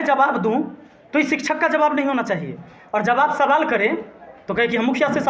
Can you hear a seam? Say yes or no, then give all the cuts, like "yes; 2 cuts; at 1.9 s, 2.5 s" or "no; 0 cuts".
no; 0 cuts